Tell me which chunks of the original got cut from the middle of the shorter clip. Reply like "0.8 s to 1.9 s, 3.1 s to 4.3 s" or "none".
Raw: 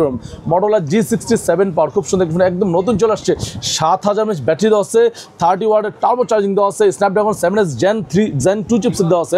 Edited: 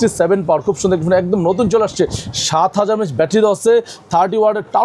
none